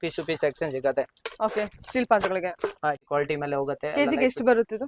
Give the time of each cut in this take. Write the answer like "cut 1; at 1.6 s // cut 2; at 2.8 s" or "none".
cut 1; at 3.0 s

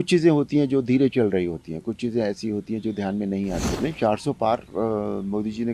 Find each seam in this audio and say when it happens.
cut 1; at 3.7 s

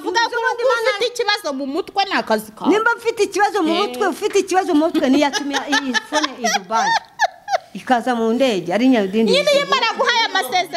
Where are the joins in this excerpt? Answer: none

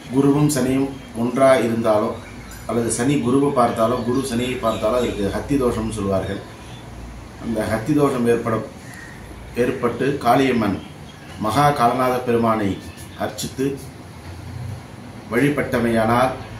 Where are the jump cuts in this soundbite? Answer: none

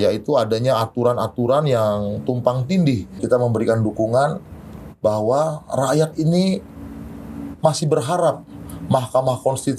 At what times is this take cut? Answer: cut 1; at 3.1 s

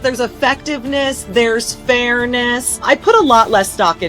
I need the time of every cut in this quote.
cut 1; at 2.8 s

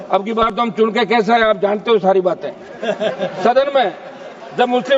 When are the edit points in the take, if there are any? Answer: none

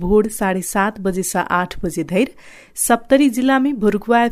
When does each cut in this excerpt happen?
none

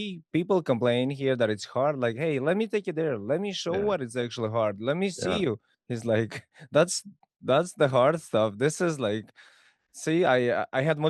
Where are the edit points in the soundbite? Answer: none

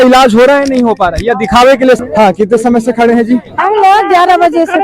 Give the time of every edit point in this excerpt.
cut 1; at 2.0 s

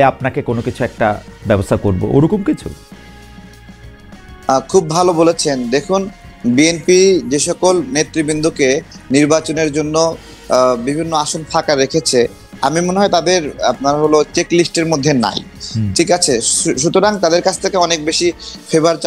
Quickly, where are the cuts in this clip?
none

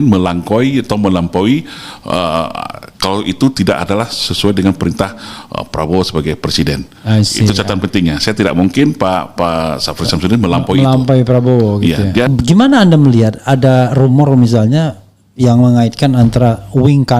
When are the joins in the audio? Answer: cut 1; at 12.3 s

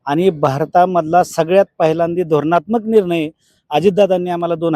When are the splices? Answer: none

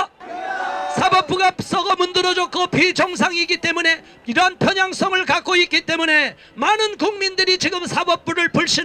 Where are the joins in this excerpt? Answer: none

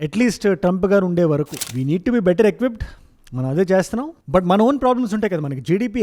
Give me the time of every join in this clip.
cut 1; at 1.6 s

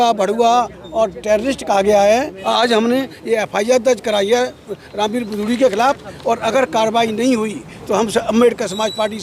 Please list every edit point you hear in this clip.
cut 1; at 2.4 s

